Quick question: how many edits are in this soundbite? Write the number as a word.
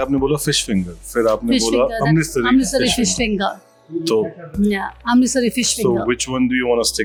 zero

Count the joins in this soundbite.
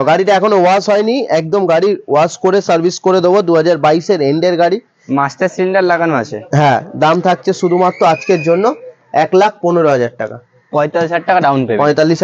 zero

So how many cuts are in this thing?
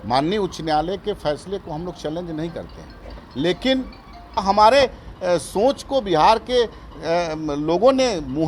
one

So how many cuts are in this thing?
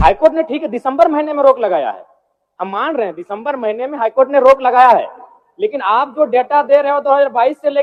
zero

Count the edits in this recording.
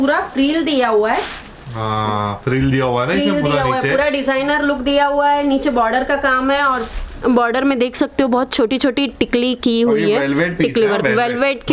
zero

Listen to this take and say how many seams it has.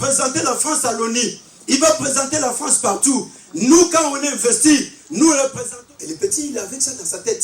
one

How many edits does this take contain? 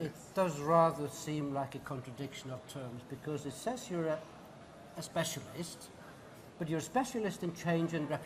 zero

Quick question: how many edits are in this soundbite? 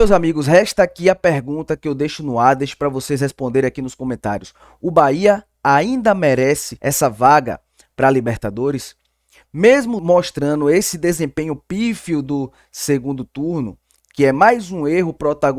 two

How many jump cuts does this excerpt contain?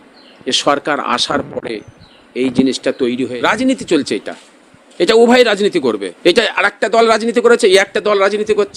two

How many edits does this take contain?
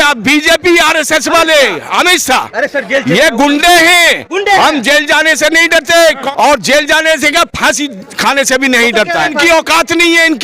two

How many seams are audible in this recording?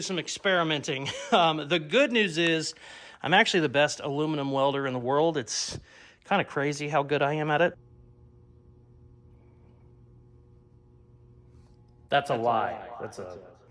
zero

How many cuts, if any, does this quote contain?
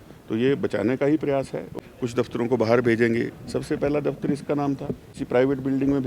two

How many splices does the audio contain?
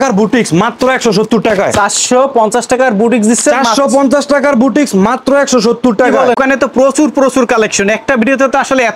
one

